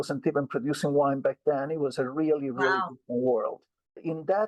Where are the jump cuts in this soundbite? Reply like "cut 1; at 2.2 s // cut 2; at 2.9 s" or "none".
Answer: none